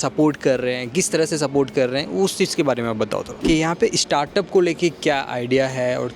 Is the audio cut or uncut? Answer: cut